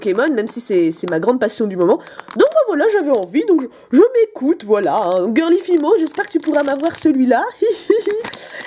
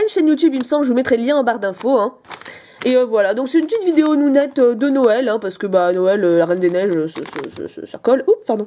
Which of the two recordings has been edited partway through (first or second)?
second